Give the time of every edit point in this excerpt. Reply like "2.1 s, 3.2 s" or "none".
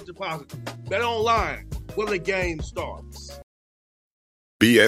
3.4 s